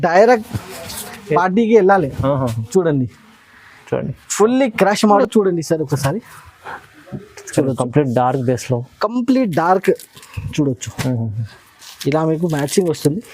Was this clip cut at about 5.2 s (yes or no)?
yes